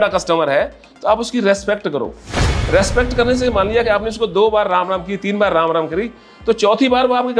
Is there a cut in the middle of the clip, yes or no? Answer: no